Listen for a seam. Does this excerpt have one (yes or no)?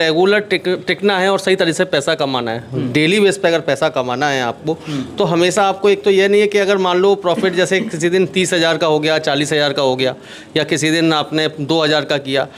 no